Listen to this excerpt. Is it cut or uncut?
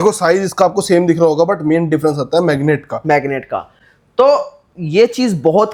uncut